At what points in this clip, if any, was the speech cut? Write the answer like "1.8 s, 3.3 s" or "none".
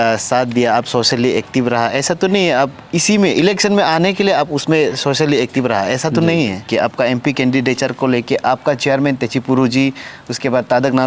6.7 s